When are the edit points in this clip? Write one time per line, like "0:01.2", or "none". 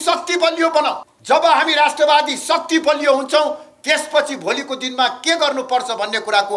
0:01.1